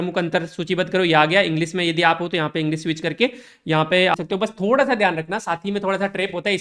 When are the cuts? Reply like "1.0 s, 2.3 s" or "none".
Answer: 4.1 s